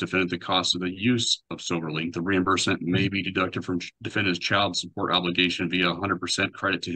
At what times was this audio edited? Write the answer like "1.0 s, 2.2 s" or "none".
none